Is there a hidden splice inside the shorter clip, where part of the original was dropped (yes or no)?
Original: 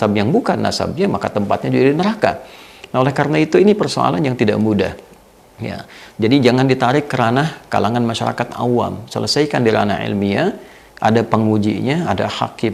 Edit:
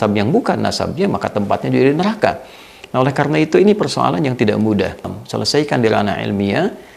yes